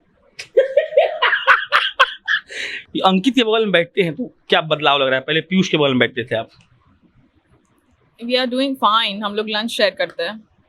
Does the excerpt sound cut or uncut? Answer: cut